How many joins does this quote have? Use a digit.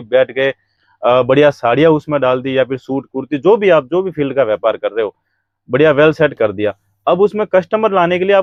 0